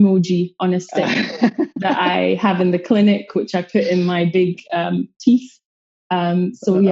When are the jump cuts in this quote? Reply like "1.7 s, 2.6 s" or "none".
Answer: none